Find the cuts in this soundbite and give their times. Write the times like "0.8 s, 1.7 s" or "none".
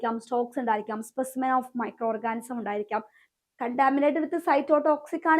3.2 s